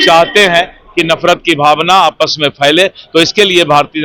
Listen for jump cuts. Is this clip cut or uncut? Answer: uncut